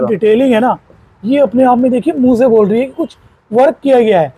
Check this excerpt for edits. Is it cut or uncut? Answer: uncut